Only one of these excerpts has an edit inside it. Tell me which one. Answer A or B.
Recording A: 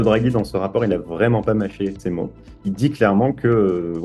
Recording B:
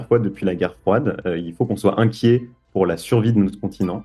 A